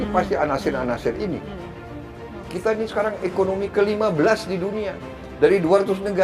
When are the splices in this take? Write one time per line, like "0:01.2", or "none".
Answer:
0:01.9